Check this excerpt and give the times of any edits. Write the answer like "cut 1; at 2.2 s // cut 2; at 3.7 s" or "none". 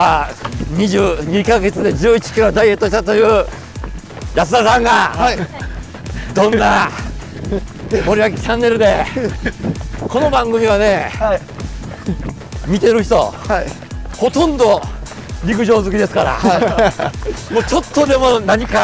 none